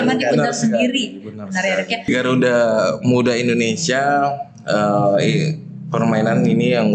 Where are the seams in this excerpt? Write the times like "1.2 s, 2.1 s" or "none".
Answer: 2.1 s